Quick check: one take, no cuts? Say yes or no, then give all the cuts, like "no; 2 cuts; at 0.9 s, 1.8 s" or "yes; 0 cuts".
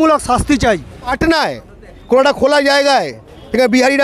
no; 1 cut; at 1.1 s